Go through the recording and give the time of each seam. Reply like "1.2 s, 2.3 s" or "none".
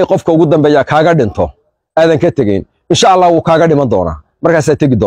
none